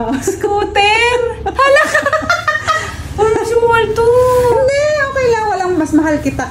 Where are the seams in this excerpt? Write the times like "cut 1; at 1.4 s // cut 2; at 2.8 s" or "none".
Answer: none